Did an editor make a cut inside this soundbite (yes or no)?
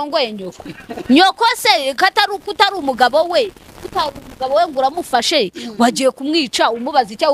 no